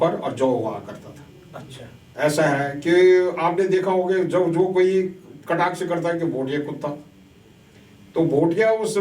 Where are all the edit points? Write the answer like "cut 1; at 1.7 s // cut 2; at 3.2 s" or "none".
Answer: cut 1; at 2.0 s